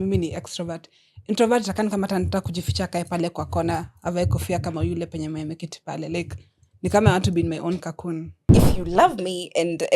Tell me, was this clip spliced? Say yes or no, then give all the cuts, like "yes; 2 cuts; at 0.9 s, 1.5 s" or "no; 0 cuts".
yes; 1 cut; at 8.5 s